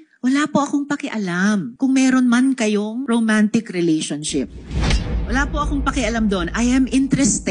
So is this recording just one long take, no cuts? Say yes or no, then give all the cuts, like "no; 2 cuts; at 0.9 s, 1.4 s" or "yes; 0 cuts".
no; 2 cuts; at 1.7 s, 3.0 s